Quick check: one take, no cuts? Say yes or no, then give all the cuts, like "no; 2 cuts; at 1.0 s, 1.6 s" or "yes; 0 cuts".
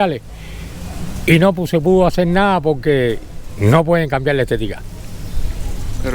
yes; 0 cuts